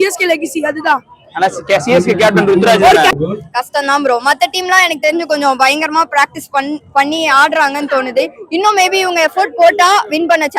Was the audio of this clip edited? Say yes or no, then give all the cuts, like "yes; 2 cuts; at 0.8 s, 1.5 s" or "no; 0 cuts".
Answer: yes; 1 cut; at 3.2 s